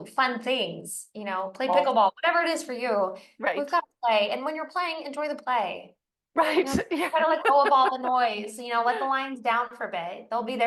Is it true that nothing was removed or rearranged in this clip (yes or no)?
yes